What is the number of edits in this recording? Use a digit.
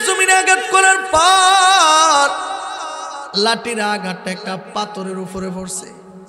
0